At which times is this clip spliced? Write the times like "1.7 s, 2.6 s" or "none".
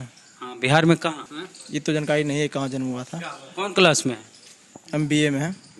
1.3 s